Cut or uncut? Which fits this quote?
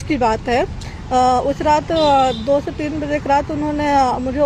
uncut